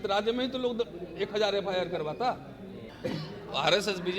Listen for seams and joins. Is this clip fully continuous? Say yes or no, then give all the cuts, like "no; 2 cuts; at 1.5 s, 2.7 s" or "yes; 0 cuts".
no; 1 cut; at 2.9 s